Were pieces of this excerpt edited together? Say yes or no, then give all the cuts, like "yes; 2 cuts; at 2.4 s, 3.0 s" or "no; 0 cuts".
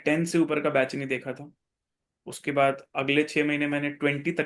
no; 0 cuts